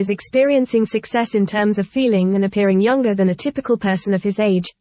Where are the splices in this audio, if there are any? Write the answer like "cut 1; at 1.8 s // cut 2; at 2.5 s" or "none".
none

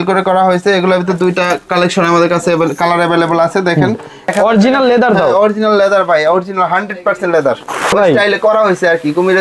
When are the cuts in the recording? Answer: cut 1; at 4.3 s // cut 2; at 7.9 s

